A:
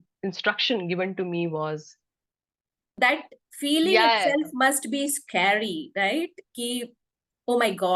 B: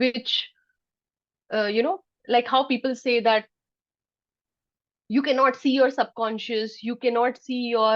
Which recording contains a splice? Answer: A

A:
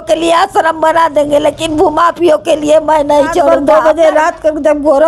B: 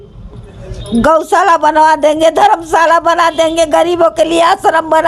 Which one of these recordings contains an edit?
A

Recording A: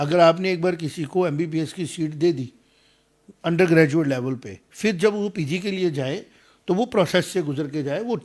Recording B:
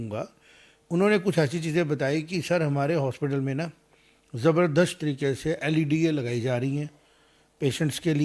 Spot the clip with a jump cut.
B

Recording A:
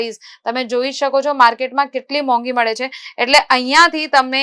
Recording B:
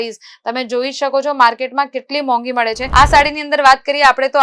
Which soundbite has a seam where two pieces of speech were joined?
B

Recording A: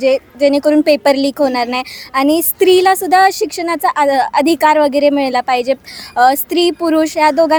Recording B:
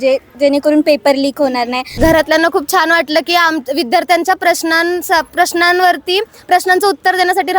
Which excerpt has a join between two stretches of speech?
B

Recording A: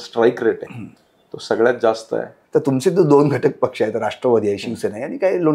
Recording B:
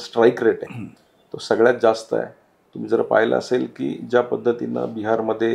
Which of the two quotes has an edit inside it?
A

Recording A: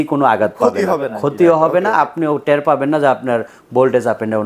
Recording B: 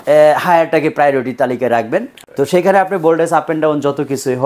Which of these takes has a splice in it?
B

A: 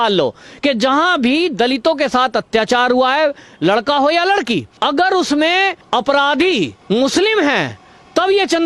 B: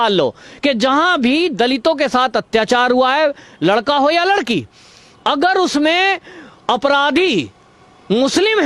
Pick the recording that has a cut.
A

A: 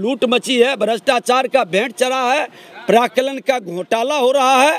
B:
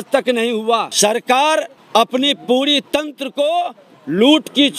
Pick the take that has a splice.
B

